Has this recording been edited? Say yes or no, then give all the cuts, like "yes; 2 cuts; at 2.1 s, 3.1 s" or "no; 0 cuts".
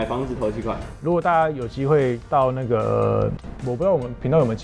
no; 0 cuts